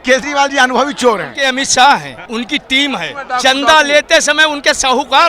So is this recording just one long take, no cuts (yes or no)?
no